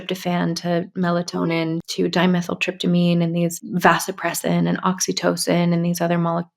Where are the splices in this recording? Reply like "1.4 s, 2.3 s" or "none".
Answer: 1.9 s, 3.6 s